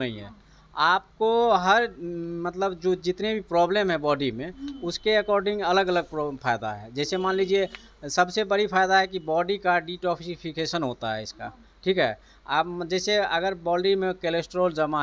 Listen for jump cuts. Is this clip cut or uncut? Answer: uncut